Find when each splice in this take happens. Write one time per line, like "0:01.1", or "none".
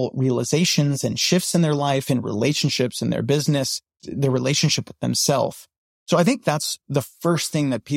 0:04.0
0:06.7